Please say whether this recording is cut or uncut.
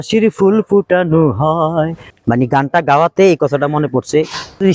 cut